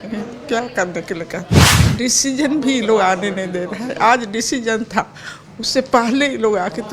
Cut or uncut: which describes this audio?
cut